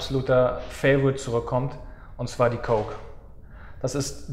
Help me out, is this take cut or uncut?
uncut